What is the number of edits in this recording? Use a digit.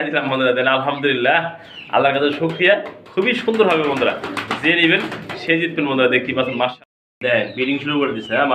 1